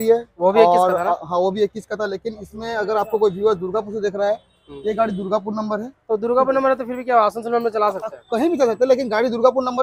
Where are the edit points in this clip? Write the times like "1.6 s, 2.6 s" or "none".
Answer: none